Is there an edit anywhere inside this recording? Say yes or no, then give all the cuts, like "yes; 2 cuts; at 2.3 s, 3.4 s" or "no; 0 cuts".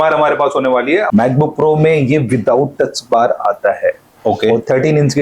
yes; 1 cut; at 1.1 s